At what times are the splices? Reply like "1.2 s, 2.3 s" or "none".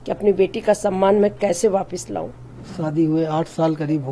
2.6 s